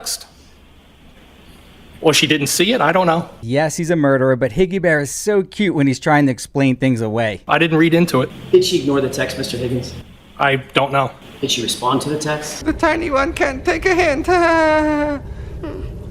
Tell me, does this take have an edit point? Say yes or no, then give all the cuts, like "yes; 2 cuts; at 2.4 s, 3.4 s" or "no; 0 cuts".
no; 0 cuts